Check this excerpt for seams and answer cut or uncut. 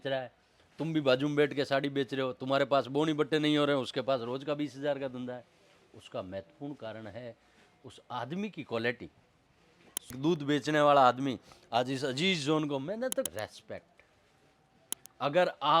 cut